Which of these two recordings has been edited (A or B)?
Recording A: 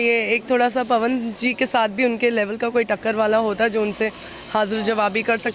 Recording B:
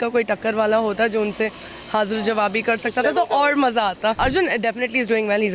B